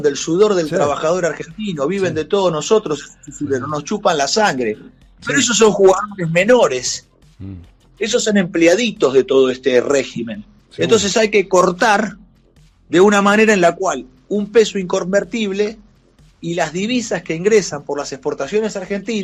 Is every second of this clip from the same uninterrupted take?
yes; 0 cuts

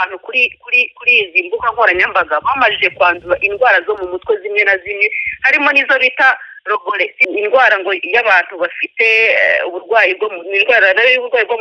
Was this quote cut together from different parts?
yes; 1 cut; at 7.2 s

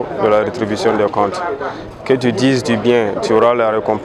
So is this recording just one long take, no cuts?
yes; 0 cuts

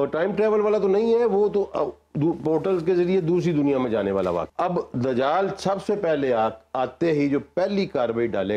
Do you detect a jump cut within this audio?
yes; 1 cut; at 4.5 s

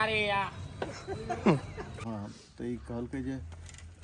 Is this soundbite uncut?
no; 1 cut; at 2.1 s

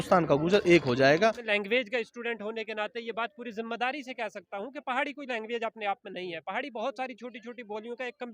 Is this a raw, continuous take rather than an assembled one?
no; 1 cut; at 1.2 s

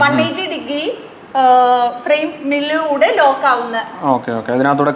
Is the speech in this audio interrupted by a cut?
no; 0 cuts

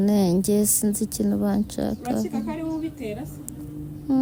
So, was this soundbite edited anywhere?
no; 0 cuts

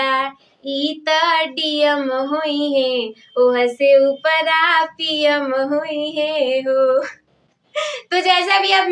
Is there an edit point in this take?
no; 0 cuts

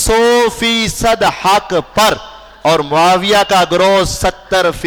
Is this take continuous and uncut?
yes; 0 cuts

